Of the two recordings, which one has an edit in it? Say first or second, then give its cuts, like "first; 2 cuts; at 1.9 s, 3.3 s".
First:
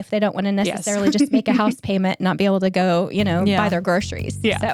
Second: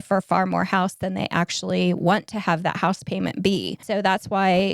second; 1 cut; at 3.8 s